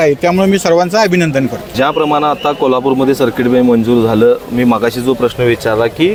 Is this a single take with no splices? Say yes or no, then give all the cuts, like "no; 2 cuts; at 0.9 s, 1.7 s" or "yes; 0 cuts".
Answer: yes; 0 cuts